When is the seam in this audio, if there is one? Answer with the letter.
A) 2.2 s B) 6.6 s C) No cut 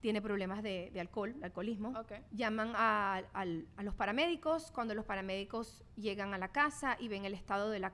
A